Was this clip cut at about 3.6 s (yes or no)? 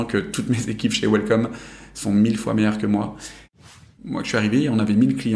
yes